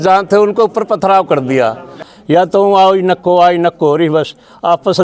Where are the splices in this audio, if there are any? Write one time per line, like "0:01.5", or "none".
0:02.1